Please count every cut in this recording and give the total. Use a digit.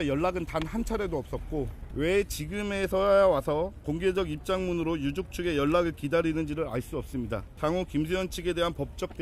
2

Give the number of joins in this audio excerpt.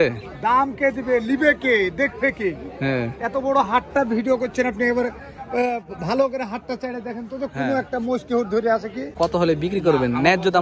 1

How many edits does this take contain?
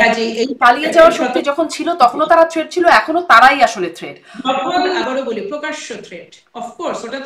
1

